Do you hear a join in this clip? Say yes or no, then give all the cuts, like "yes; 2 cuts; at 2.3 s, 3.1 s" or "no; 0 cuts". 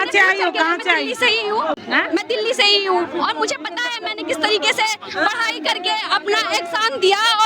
no; 0 cuts